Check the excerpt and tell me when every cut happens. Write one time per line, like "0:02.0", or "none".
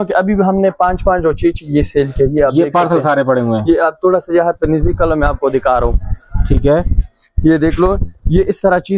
none